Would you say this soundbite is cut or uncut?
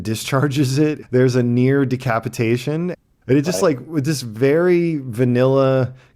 cut